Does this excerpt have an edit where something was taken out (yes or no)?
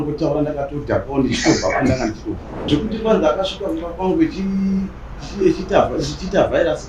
yes